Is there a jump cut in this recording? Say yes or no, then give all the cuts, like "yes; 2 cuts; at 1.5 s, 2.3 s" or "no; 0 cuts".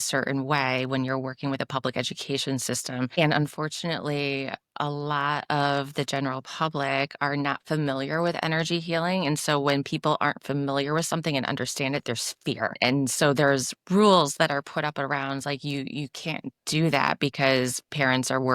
yes; 2 cuts; at 3.1 s, 12.8 s